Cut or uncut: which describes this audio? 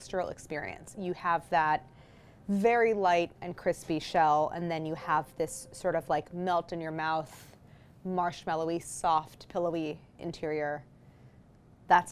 uncut